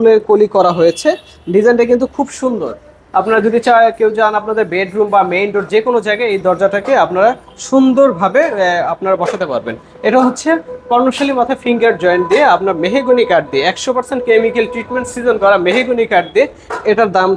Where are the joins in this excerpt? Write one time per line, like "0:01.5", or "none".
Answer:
none